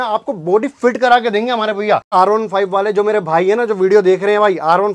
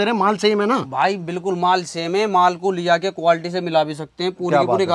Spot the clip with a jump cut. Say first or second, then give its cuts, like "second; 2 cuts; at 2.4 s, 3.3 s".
first; 1 cut; at 2.1 s